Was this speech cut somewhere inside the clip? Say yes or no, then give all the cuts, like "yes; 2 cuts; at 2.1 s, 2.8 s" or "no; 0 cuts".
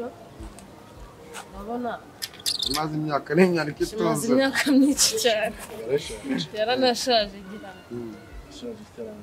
no; 0 cuts